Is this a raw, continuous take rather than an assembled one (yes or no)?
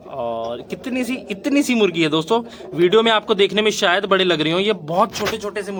yes